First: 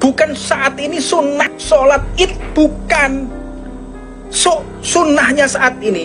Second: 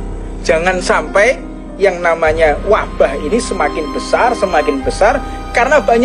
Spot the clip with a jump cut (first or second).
first